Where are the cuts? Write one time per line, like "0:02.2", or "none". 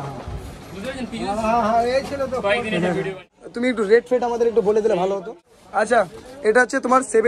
0:03.4